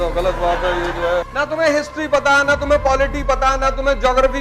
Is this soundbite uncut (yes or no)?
no